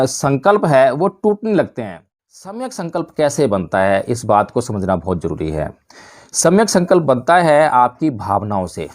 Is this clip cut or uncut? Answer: cut